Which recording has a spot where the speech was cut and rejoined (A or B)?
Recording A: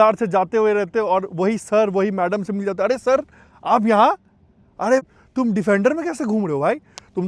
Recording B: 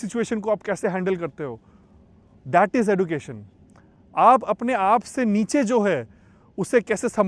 A